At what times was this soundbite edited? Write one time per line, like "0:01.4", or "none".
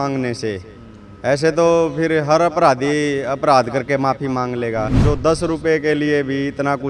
0:05.0